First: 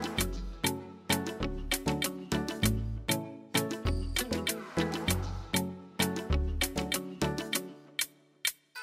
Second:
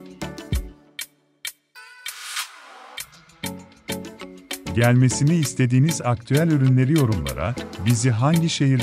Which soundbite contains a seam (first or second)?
second